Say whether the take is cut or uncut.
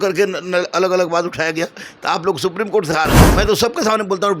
cut